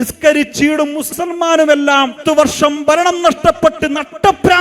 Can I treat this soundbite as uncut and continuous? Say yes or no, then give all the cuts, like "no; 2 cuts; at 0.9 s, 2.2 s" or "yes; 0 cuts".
no; 2 cuts; at 1.1 s, 2.2 s